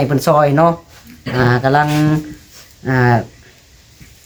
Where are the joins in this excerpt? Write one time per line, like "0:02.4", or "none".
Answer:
none